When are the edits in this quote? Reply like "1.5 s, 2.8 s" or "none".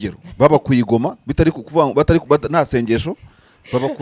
none